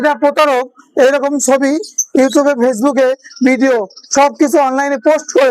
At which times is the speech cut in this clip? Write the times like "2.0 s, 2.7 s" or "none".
none